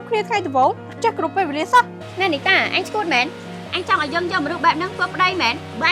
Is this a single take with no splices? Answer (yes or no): no